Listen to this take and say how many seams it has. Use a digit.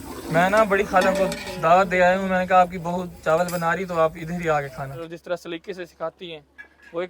1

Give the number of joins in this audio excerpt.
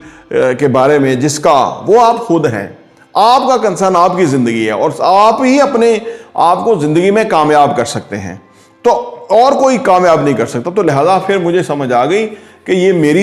0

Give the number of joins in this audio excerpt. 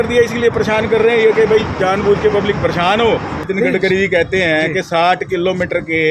1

